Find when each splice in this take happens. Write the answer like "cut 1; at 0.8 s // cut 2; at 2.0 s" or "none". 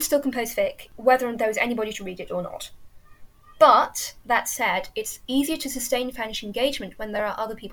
none